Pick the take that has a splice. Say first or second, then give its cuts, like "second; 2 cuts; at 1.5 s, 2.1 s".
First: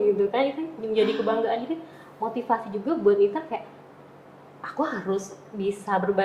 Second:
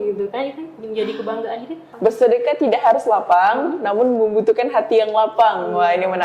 second; 1 cut; at 1.8 s